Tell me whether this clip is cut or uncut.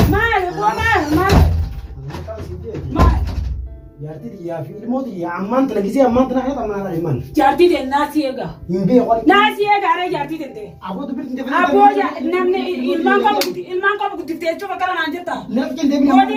uncut